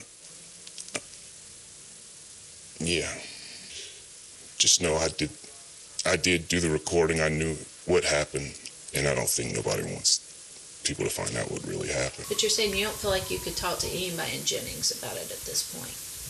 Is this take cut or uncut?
cut